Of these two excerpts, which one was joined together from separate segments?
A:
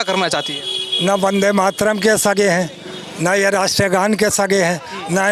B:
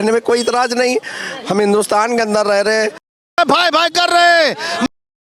B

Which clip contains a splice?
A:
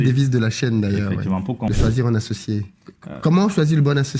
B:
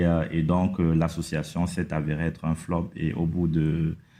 A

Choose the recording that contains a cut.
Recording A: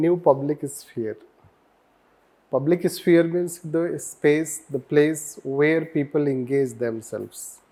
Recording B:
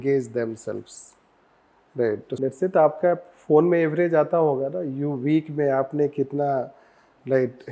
B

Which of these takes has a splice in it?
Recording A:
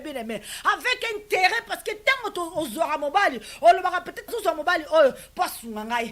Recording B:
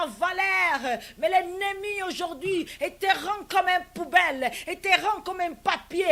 A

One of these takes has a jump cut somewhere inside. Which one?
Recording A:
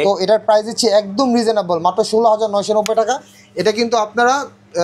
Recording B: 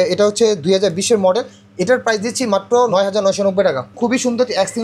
B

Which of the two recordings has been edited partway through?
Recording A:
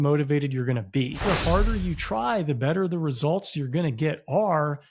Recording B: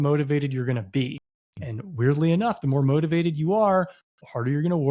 A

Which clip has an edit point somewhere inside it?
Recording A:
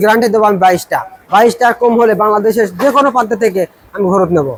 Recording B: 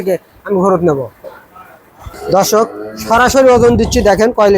B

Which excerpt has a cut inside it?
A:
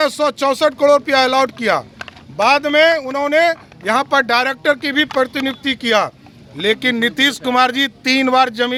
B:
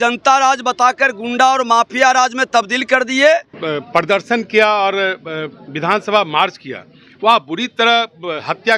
B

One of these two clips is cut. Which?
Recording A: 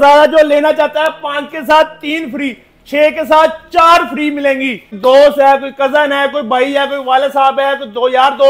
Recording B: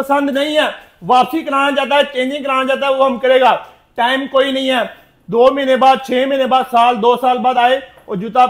A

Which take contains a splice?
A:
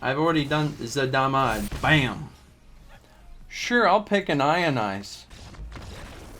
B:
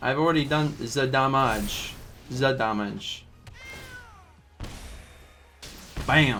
A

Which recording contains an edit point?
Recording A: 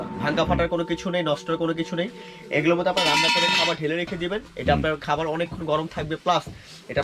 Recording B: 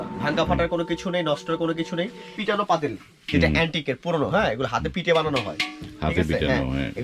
B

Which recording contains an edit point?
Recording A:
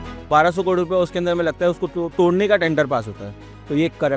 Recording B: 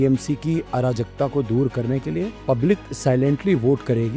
B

